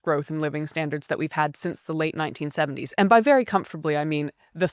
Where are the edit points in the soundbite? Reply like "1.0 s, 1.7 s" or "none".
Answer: 2.8 s